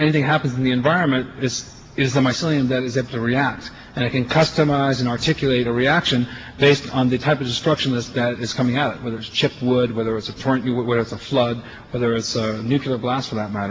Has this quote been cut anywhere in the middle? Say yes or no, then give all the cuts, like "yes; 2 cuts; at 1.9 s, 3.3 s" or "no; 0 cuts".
yes; 1 cut; at 11.8 s